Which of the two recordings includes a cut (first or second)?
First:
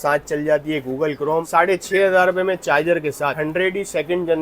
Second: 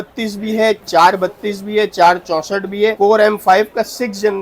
first